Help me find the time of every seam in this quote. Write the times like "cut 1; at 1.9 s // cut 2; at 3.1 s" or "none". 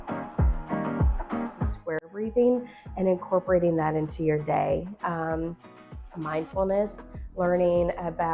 cut 1; at 1.8 s

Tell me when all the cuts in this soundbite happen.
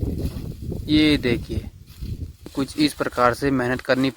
cut 1; at 2.5 s

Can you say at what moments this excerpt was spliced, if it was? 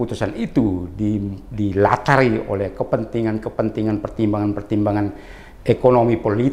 none

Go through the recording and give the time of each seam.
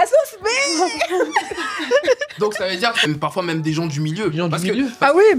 cut 1; at 3.0 s

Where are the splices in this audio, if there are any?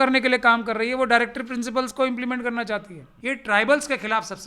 cut 1; at 3.1 s

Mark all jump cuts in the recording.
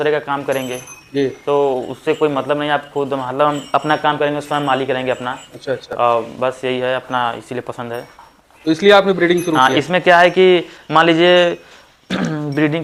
none

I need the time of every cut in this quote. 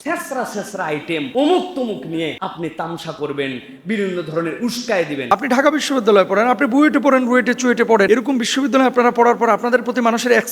cut 1; at 1.3 s // cut 2; at 2.4 s // cut 3; at 5.3 s // cut 4; at 8.1 s

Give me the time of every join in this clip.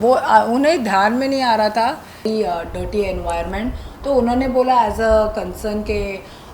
cut 1; at 2.2 s

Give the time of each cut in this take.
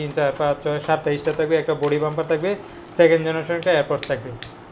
none

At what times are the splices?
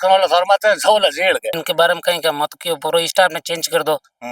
cut 1; at 1.5 s

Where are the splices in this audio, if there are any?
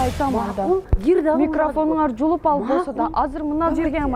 none

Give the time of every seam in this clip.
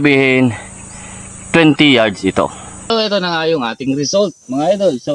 cut 1; at 2.9 s

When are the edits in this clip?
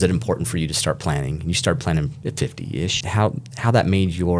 cut 1; at 3.0 s

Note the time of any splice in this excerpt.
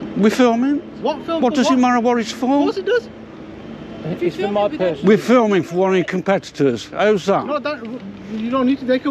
none

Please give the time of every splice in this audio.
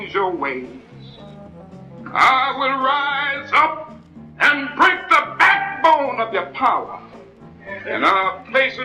none

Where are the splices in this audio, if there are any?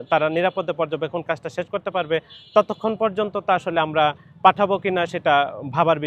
none

